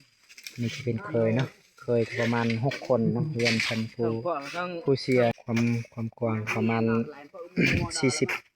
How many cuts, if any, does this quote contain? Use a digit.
1